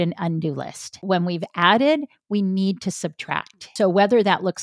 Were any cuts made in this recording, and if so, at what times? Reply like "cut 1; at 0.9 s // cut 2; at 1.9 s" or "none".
cut 1; at 1.0 s // cut 2; at 3.7 s